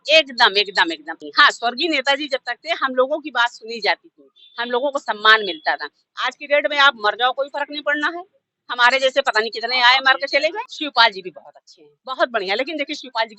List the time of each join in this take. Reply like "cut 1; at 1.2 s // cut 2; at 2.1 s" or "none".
cut 1; at 1.1 s // cut 2; at 10.7 s